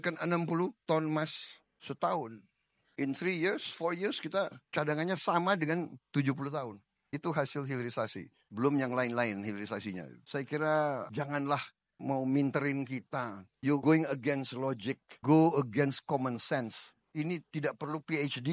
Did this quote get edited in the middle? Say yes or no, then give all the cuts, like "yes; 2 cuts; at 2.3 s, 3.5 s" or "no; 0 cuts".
no; 0 cuts